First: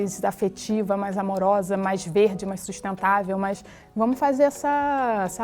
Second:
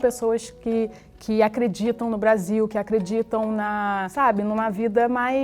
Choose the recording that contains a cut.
second; 1 cut; at 4.1 s

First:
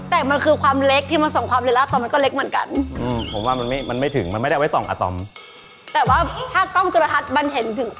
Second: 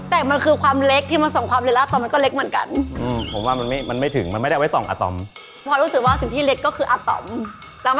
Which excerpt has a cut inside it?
second; 1 cut; at 5.7 s

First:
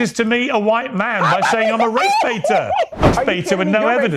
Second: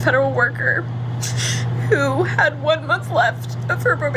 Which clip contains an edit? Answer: first; 1 cut; at 3.2 s

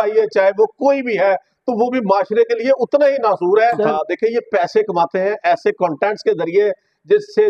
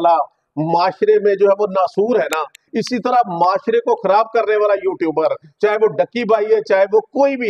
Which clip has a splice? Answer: first; 1 cut; at 3.9 s

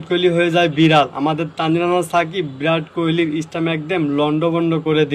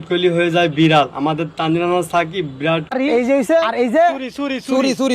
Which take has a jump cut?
second; 1 cut; at 2.9 s

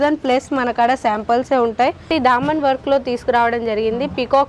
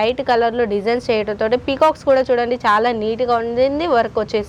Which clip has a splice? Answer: first; 1 cut; at 2.1 s

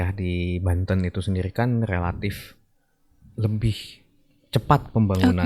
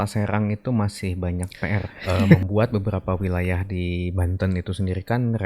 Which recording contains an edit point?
second; 1 cut; at 2.4 s

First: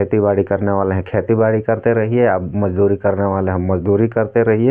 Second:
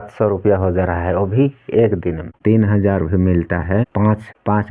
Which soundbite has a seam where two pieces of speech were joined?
second; 1 cut; at 2.3 s

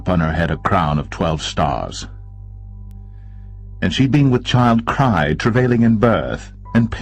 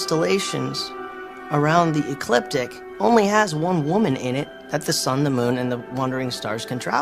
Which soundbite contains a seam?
first; 1 cut; at 5.5 s

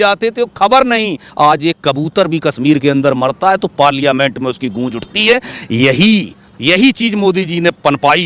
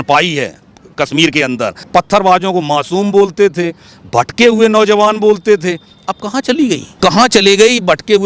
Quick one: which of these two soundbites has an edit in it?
second; 2 cuts; at 1.8 s, 6.9 s

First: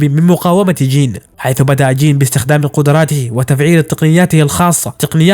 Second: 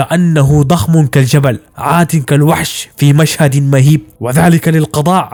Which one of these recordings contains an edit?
first; 1 cut; at 1.3 s

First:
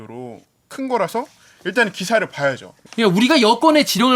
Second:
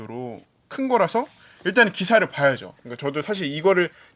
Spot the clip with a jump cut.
first; 1 cut; at 2.7 s

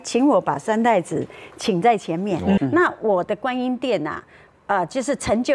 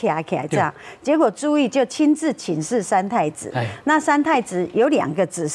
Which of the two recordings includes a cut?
first; 1 cut; at 2.6 s

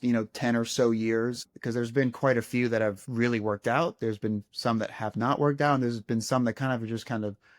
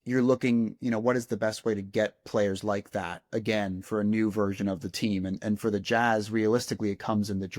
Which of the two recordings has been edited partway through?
first; 2 cuts; at 1.5 s, 3.0 s

